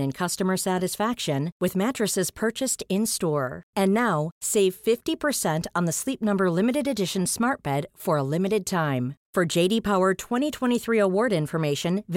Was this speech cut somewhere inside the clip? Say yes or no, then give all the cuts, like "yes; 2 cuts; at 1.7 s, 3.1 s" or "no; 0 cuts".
no; 0 cuts